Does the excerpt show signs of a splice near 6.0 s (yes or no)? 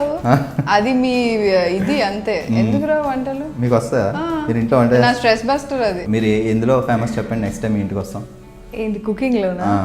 yes